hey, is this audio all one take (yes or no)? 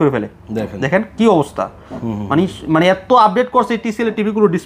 yes